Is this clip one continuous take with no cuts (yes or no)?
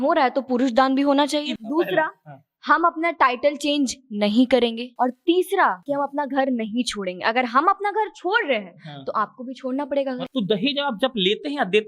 no